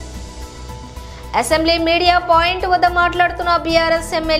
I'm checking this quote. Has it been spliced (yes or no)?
no